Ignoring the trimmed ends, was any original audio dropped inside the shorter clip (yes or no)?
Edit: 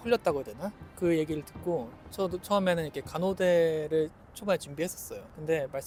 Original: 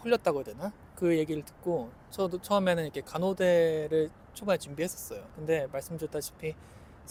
no